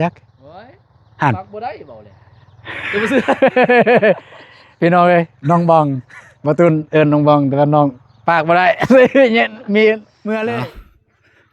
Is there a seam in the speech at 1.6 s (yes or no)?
no